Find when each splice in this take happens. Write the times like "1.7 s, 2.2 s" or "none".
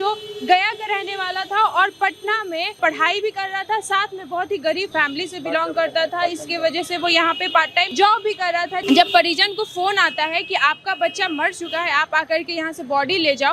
8.8 s

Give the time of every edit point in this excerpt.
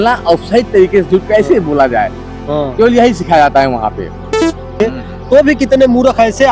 4.6 s

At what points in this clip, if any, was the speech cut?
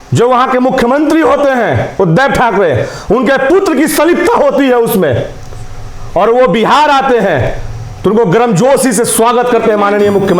none

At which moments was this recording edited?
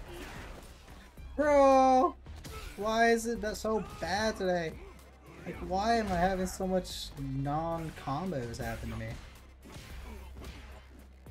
none

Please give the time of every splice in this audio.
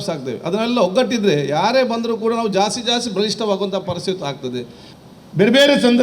4.9 s

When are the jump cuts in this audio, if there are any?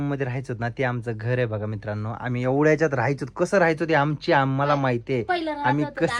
none

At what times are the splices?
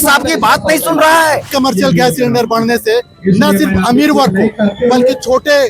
1.5 s

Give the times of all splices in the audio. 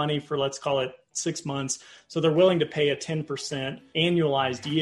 3.8 s

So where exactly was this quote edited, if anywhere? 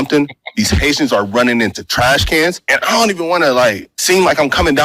2.7 s, 3.9 s

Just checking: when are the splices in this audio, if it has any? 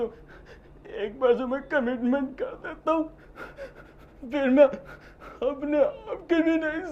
none

